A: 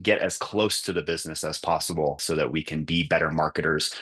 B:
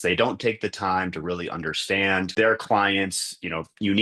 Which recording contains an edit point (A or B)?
A